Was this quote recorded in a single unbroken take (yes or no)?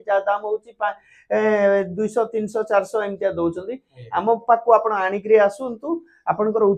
yes